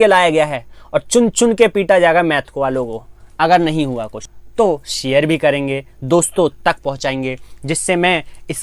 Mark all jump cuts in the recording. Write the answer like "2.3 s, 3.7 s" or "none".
4.4 s